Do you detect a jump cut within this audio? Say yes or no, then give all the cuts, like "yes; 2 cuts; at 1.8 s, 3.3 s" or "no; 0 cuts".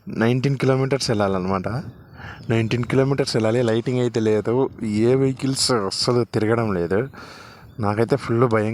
no; 0 cuts